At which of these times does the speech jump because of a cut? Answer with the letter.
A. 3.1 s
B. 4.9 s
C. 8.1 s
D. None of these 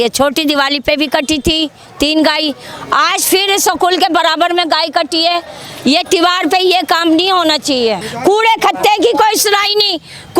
C